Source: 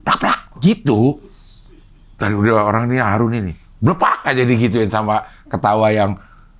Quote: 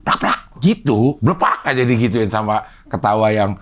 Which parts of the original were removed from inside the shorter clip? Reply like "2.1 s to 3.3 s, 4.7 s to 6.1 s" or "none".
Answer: 1.2 s to 3.8 s